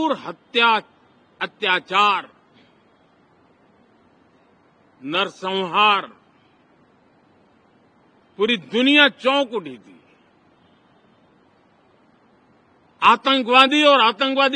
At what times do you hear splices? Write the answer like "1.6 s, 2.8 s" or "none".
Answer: none

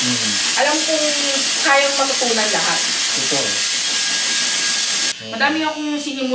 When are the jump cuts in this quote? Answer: 5.1 s

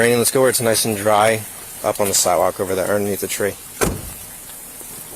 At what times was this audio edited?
none

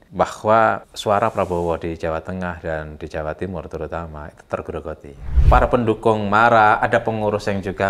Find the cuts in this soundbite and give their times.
0.9 s, 5.3 s

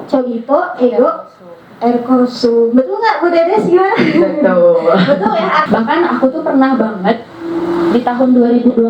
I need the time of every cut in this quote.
5.6 s

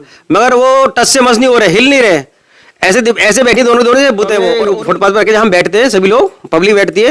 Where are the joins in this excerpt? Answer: 4.5 s

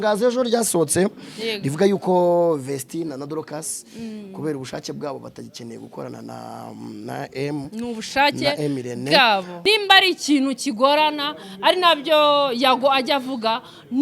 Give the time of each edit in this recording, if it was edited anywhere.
9.5 s

